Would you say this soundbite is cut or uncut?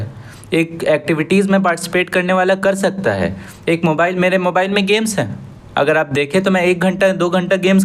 uncut